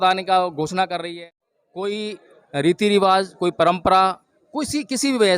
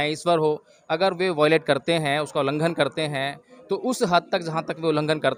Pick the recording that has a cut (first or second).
first